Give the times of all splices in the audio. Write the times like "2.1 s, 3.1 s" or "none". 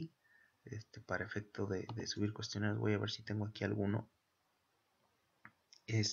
3.9 s